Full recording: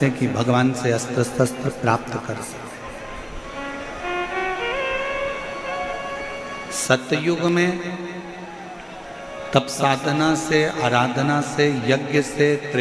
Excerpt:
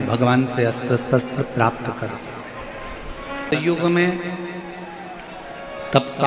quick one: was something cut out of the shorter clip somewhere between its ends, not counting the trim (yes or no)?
yes